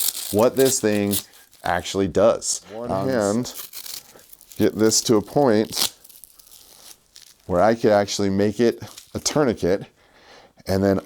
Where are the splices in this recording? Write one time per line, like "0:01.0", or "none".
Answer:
0:03.0